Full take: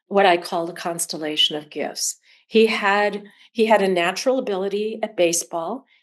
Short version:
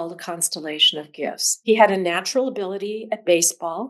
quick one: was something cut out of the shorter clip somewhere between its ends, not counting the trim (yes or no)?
yes